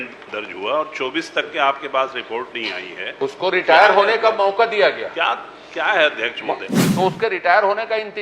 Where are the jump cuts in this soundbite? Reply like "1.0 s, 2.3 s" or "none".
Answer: 6.8 s